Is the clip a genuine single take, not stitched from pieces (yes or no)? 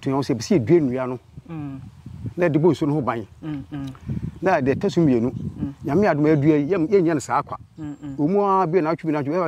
yes